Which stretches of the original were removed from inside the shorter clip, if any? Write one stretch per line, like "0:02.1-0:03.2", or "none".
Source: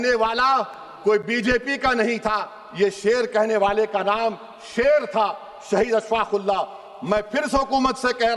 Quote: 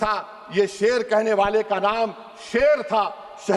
none